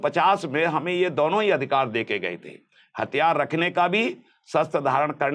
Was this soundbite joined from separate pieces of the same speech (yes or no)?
no